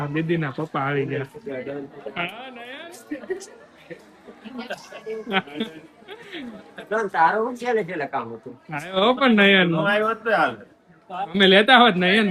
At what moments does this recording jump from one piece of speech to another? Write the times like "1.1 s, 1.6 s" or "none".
none